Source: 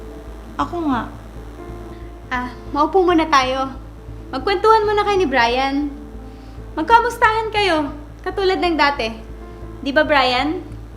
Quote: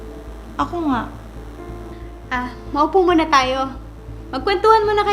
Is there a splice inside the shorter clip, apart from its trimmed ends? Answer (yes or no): no